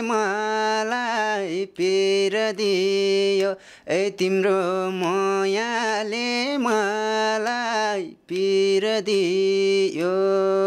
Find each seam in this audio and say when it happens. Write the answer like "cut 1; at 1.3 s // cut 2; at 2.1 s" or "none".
none